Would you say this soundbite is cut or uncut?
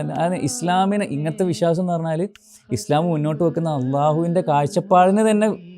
uncut